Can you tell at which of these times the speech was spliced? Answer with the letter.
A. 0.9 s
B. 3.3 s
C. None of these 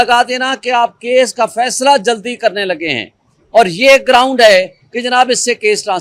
C